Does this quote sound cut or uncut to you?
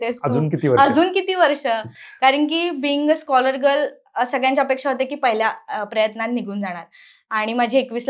uncut